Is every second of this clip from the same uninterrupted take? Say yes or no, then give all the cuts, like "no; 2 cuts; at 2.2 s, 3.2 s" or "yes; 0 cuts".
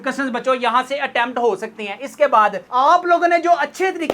no; 1 cut; at 2.7 s